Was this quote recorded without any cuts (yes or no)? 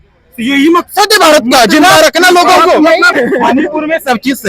no